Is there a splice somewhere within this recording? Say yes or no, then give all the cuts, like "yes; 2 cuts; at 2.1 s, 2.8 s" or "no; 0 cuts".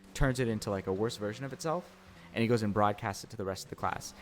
yes; 1 cut; at 2.2 s